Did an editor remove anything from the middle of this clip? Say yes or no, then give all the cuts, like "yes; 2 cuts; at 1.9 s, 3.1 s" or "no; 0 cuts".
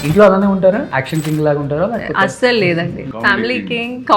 yes; 2 cuts; at 1.0 s, 3.1 s